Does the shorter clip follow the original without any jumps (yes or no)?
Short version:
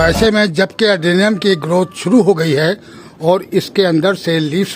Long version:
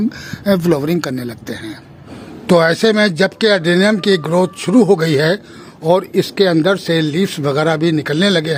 yes